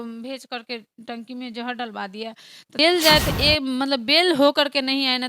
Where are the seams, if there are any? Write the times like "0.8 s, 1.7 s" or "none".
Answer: 2.7 s